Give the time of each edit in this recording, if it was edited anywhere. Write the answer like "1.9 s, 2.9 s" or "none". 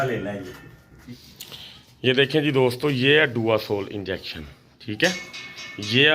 1.1 s

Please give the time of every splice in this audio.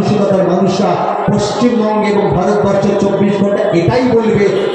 none

